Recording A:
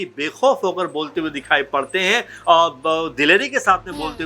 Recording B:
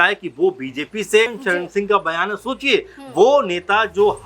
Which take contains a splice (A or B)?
B